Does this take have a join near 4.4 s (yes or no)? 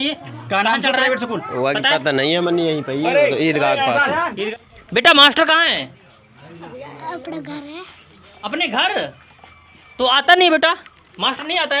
yes